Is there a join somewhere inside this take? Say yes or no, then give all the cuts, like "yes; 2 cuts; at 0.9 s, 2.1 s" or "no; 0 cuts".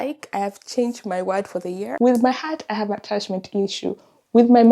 yes; 1 cut; at 1.9 s